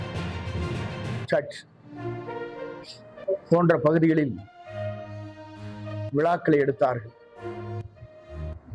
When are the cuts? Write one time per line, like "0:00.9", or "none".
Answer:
none